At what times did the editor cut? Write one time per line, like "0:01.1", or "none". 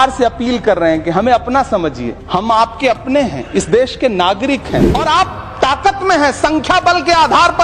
0:02.1
0:04.9